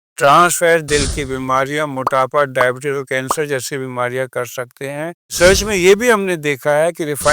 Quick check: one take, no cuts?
no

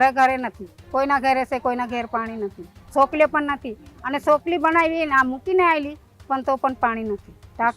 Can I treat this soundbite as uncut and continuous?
yes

